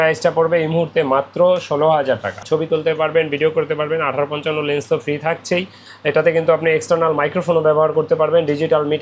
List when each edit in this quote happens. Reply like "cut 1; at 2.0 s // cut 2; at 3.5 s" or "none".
cut 1; at 2.4 s